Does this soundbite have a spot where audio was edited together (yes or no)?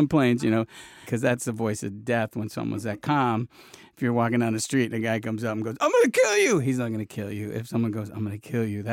yes